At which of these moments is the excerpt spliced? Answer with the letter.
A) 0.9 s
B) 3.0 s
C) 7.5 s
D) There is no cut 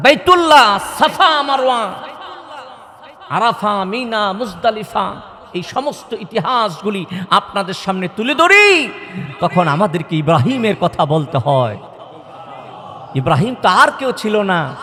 D